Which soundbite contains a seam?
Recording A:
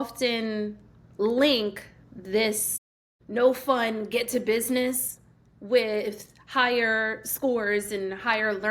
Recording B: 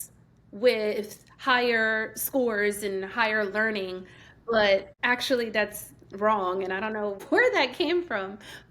B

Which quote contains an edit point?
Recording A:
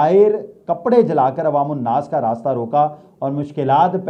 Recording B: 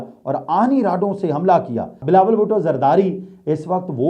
B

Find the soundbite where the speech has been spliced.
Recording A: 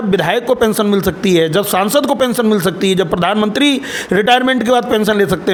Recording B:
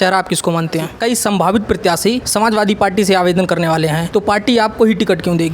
B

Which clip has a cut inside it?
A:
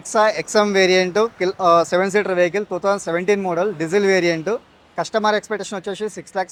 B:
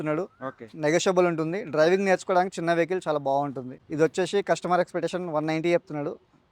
B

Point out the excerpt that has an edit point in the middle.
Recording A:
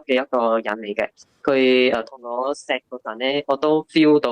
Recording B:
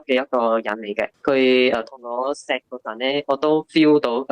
B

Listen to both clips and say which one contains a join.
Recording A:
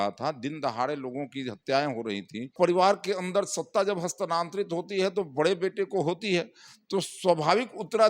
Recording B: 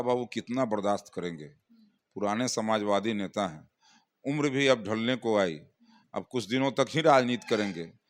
A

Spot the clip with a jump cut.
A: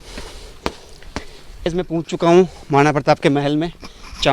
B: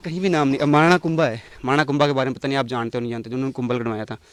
A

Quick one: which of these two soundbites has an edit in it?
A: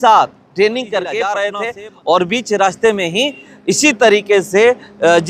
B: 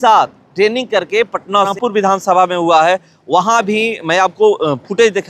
B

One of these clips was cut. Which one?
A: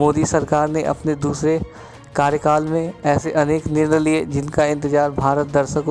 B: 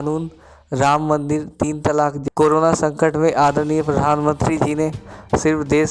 B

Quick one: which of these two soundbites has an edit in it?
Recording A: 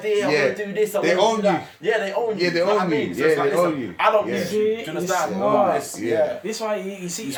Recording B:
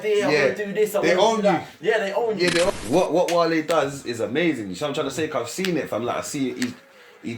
B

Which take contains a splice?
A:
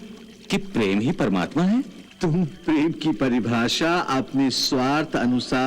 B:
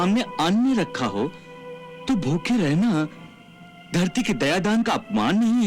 A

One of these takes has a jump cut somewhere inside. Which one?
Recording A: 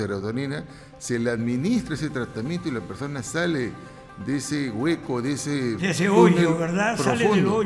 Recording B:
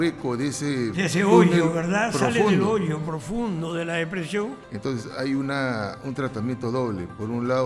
B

